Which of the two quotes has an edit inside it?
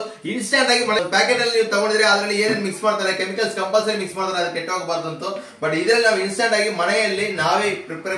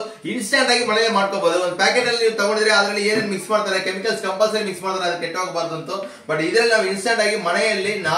first; 1 cut; at 1.0 s

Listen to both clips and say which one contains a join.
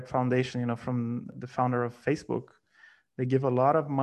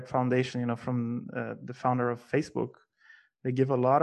first; 1 cut; at 1.4 s

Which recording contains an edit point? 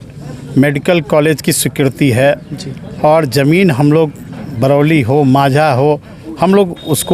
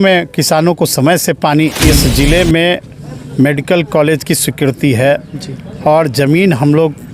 second; 1 cut; at 1.8 s

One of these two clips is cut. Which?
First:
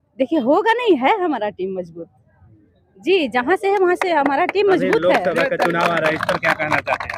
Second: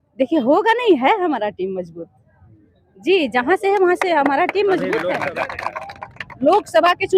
second; 1 cut; at 5.3 s

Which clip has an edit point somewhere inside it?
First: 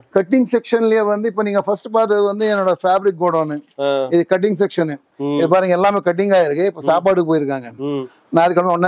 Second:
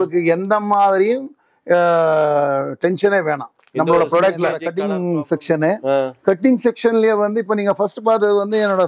second; 1 cut; at 4.7 s

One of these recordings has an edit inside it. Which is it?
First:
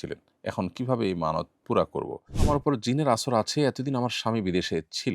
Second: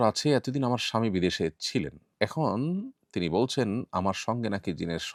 first; 1 cut; at 2.3 s

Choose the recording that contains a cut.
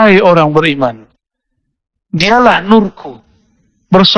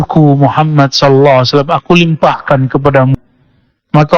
second; 1 cut; at 3.1 s

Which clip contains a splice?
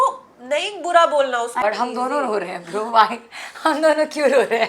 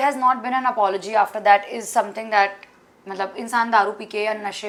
first; 1 cut; at 1.6 s

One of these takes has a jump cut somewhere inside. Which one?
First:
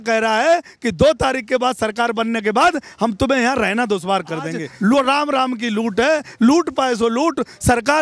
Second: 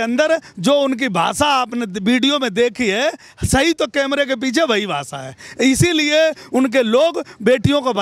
first; 1 cut; at 4.6 s

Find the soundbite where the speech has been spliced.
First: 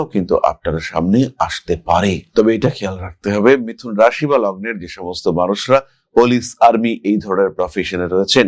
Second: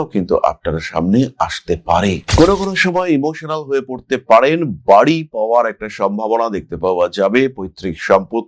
second; 1 cut; at 2.3 s

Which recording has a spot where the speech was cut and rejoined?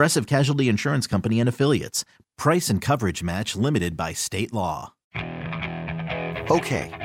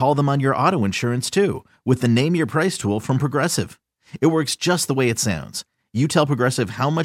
first; 1 cut; at 5.0 s

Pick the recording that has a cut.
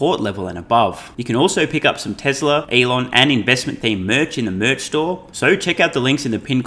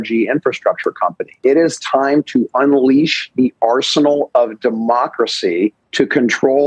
first; 3 cuts; at 1.1 s, 2.7 s, 5.3 s

